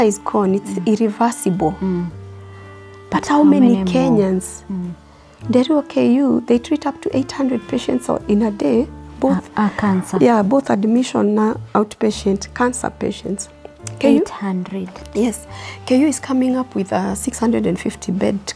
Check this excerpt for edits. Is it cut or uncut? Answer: uncut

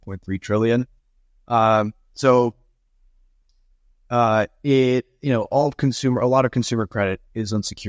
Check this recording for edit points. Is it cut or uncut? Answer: uncut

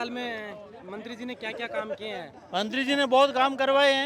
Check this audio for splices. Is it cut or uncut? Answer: uncut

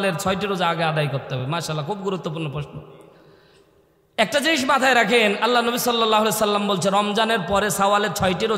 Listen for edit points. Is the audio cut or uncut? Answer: uncut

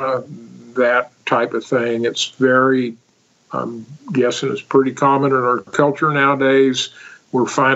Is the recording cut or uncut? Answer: uncut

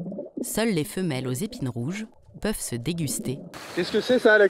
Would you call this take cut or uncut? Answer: cut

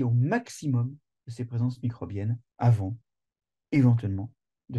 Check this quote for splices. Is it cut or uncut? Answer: cut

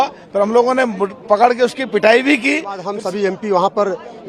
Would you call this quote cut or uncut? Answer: cut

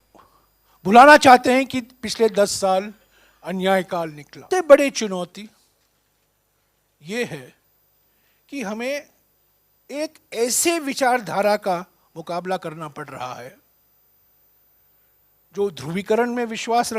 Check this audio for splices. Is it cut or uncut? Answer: cut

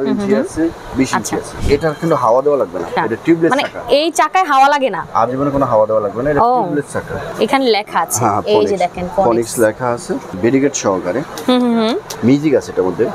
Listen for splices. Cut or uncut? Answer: cut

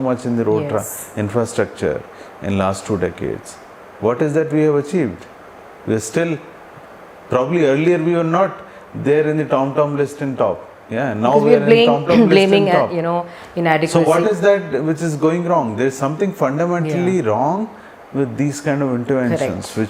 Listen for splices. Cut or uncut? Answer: uncut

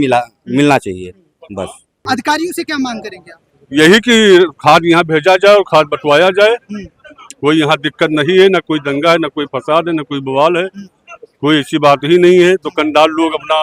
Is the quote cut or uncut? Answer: cut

